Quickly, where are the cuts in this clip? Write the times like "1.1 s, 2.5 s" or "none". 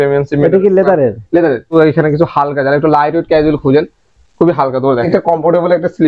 1.7 s, 5.1 s